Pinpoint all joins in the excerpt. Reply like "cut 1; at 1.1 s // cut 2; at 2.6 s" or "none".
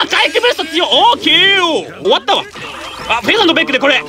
cut 1; at 1.9 s

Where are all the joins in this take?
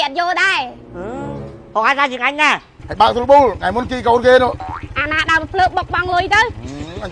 cut 1; at 2.7 s

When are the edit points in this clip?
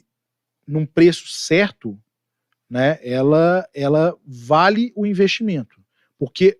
none

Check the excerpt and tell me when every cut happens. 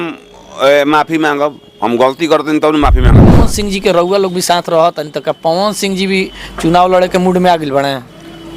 cut 1; at 3.4 s

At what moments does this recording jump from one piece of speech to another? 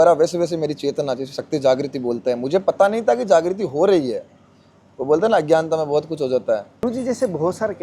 cut 1; at 6.8 s

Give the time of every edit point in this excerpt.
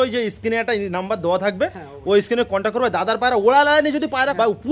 none

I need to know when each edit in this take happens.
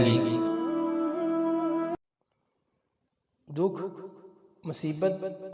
cut 1; at 2.0 s

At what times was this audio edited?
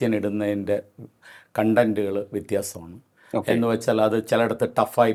none

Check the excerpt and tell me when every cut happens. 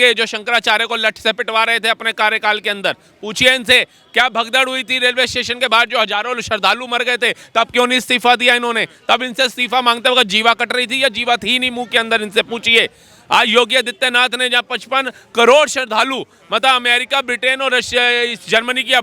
none

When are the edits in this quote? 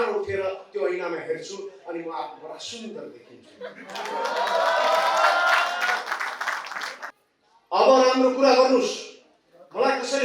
cut 1; at 7.0 s

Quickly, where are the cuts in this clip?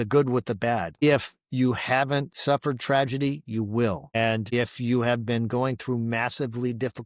cut 1; at 0.9 s

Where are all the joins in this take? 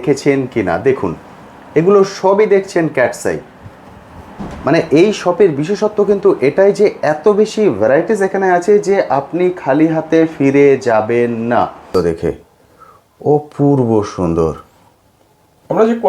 cut 1; at 11.9 s

